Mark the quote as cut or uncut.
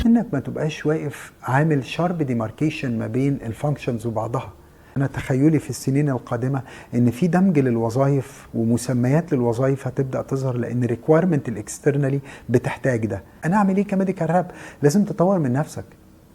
cut